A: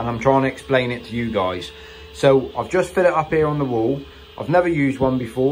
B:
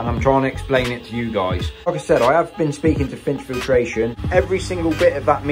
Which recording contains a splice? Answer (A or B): B